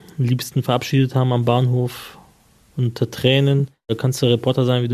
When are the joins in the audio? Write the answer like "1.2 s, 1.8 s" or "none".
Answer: 4.0 s

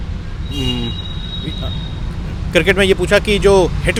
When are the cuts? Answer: none

